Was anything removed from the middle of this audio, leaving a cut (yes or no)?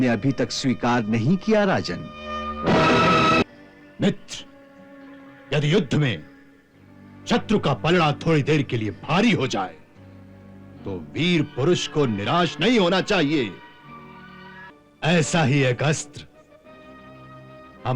yes